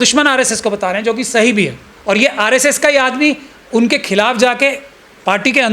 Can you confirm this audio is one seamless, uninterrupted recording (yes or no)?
no